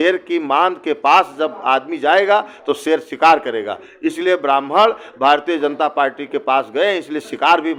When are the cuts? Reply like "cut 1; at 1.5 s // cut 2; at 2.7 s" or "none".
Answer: none